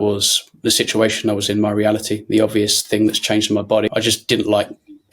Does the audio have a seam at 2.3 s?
no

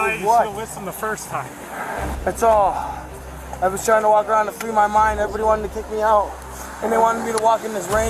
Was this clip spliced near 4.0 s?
no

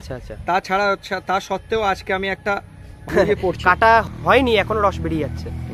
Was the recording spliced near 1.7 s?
no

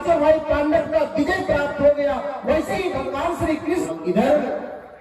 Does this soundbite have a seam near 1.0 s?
no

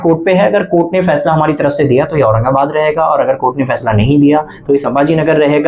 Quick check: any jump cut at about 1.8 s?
no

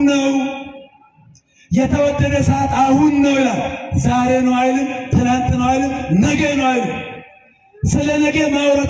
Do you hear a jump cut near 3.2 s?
no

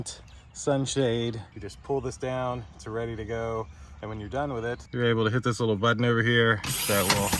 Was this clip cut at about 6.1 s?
no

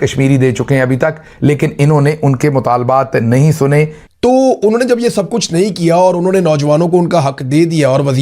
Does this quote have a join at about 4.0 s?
yes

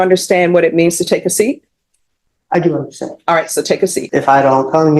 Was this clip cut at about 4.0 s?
yes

